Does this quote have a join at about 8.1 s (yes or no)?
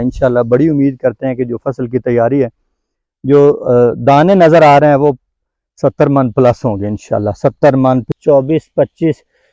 yes